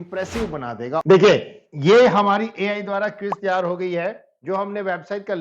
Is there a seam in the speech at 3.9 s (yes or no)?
no